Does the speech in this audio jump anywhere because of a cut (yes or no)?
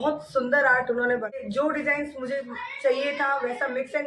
yes